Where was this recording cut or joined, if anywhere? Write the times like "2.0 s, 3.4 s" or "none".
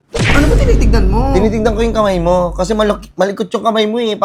none